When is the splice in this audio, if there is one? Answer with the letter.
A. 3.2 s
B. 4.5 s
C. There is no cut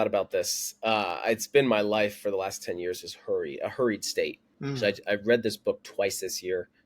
B